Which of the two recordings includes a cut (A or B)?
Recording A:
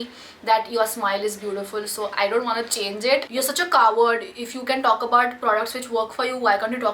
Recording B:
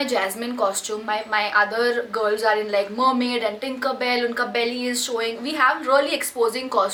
A